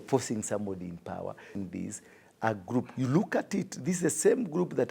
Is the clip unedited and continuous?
no; 1 cut; at 1.6 s

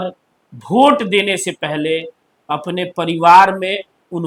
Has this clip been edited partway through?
no; 0 cuts

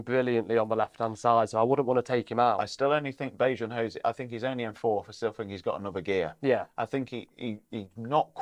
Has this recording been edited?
no; 0 cuts

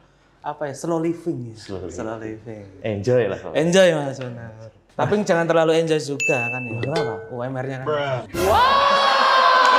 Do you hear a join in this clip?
no; 0 cuts

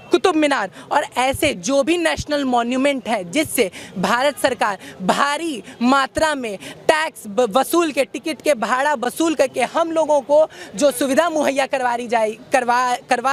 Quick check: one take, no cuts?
yes; 0 cuts

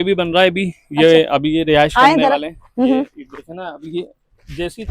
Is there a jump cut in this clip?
no; 0 cuts

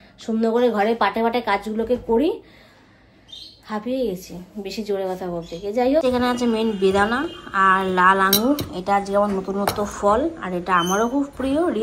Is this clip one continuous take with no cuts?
no; 1 cut; at 6.0 s

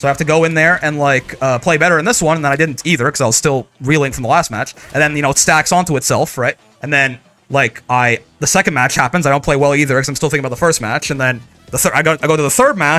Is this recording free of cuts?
yes; 0 cuts

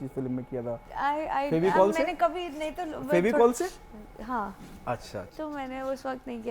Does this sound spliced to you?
no; 0 cuts

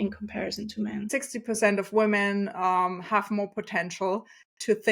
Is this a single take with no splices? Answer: no; 1 cut; at 1.1 s

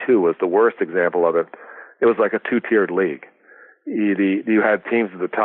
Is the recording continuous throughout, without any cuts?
yes; 0 cuts

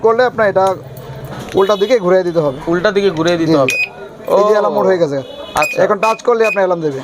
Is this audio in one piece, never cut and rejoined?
yes; 0 cuts

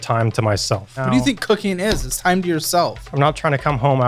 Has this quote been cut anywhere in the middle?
yes; 2 cuts; at 1.0 s, 3.0 s

